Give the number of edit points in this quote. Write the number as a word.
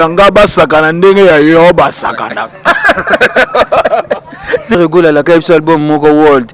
one